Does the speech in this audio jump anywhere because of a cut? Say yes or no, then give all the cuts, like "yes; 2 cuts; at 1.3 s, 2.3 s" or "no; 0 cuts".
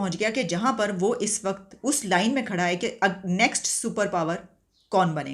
no; 0 cuts